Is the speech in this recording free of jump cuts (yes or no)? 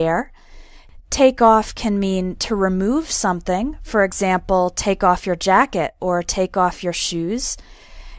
no